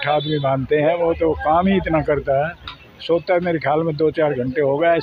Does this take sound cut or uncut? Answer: uncut